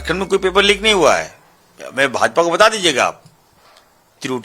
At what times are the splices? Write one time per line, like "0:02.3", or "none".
none